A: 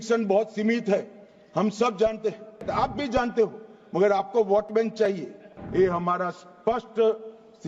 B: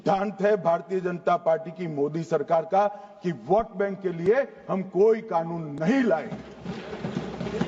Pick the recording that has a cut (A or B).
A